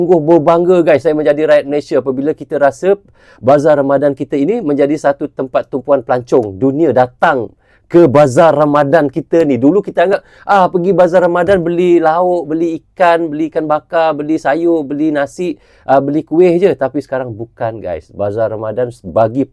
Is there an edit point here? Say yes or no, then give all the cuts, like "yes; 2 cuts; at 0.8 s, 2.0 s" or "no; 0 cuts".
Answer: no; 0 cuts